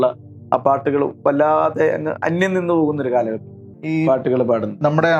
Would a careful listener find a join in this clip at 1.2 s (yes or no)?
no